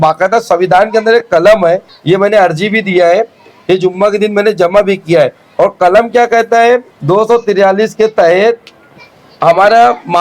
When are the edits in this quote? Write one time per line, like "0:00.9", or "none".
0:01.9
0:06.9